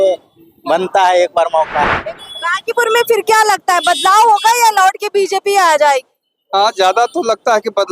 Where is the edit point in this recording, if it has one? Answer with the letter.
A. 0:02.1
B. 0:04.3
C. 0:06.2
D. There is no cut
A